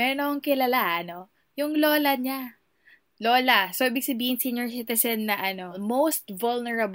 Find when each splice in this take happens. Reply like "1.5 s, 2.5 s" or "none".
5.8 s

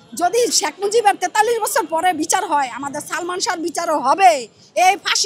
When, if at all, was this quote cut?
none

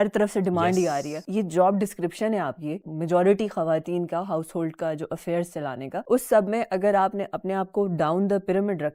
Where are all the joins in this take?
none

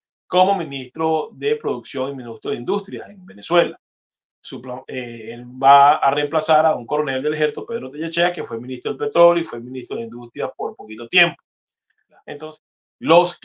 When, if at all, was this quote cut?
12.2 s

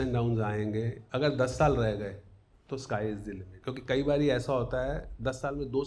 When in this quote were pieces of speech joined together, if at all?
1.0 s, 3.5 s

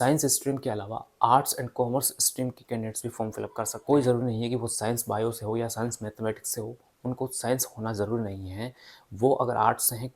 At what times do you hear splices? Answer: 3.7 s

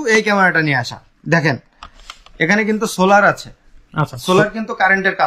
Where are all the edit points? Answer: none

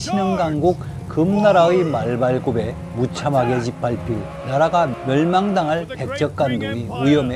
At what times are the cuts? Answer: none

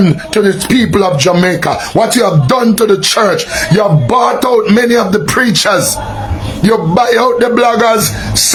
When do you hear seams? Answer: none

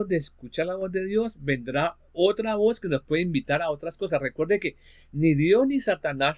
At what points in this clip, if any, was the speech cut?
none

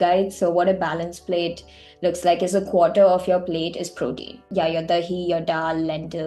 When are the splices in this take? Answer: 4.3 s

